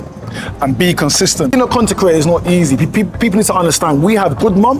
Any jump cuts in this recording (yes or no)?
yes